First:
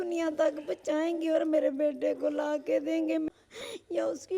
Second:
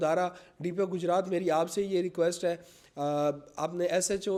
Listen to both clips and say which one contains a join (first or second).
first